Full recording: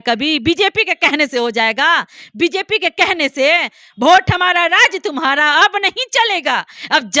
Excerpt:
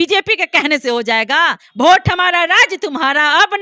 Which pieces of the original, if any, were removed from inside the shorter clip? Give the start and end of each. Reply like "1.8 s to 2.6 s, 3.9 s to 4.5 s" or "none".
2.1 s to 3.8 s